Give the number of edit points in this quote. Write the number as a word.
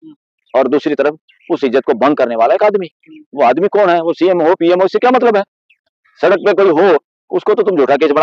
zero